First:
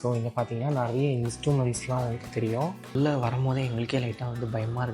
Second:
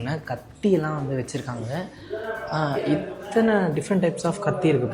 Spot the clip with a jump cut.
first; 1 cut; at 2.9 s

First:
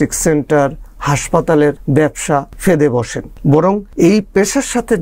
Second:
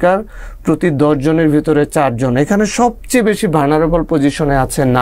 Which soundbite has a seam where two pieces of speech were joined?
first; 2 cuts; at 2.0 s, 3.8 s

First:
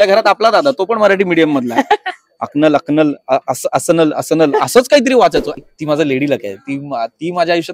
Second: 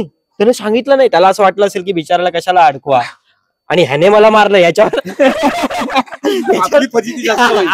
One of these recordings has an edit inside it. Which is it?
first; 1 cut; at 5.6 s

